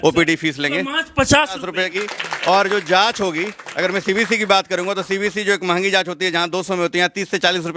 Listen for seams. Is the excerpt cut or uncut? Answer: cut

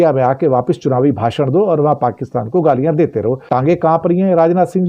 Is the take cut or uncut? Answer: cut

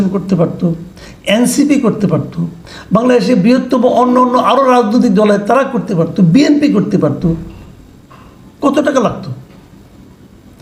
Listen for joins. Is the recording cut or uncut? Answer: uncut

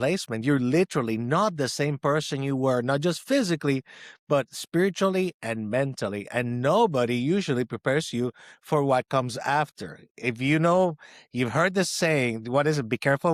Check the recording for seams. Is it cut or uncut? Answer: uncut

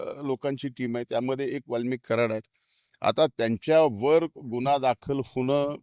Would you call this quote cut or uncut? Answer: uncut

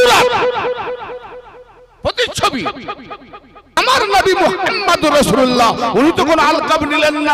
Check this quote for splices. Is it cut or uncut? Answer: cut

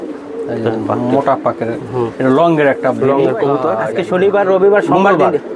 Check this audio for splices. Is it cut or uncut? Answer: cut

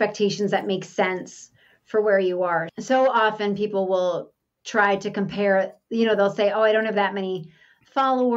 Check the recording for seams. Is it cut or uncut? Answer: uncut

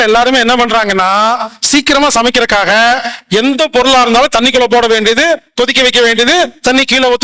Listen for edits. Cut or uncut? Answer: uncut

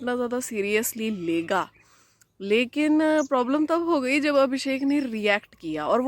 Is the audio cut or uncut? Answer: uncut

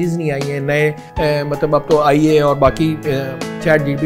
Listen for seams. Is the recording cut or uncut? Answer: cut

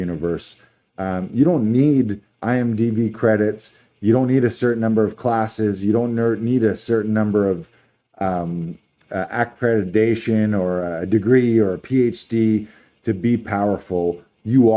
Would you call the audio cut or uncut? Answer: uncut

